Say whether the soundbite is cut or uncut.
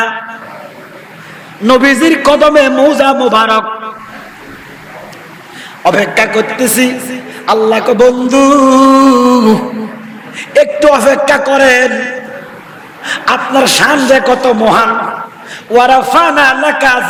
uncut